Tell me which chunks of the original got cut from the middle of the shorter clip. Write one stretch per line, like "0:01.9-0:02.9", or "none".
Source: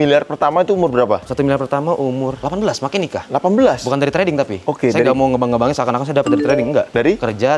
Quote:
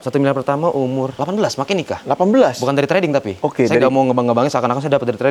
none